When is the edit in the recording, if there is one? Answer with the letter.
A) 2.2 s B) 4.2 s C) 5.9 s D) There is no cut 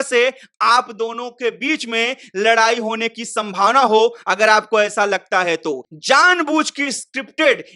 C